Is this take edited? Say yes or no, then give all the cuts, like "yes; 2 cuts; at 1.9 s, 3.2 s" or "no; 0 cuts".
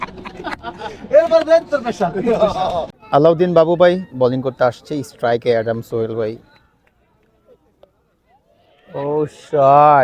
yes; 1 cut; at 2.9 s